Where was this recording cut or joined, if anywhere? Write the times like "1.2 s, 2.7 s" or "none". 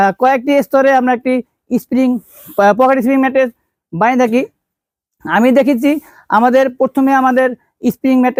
none